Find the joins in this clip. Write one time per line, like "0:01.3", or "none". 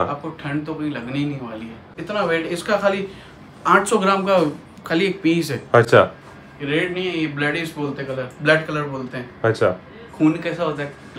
0:01.9
0:05.9